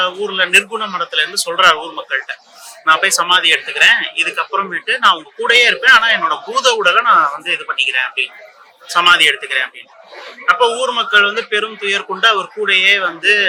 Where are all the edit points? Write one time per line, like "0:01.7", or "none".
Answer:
none

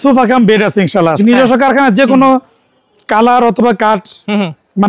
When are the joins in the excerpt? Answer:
0:01.1

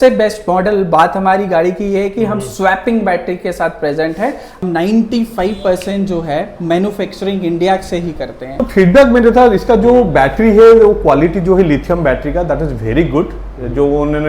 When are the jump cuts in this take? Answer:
0:04.6
0:08.6

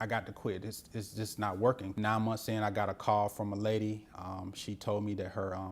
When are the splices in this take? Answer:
0:01.9

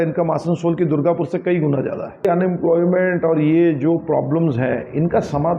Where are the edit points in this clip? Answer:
0:02.2

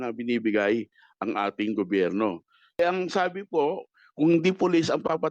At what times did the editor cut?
0:02.8

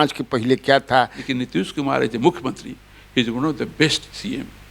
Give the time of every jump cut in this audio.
0:01.2

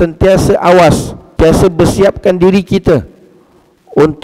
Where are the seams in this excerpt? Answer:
0:01.2

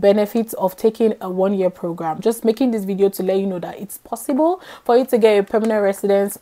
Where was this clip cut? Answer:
0:02.2

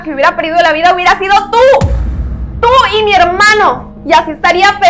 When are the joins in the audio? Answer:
none

